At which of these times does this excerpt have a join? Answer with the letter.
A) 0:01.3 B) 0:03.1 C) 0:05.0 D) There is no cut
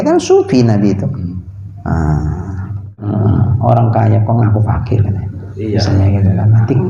B